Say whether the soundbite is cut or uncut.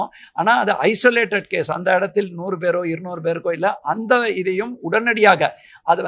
uncut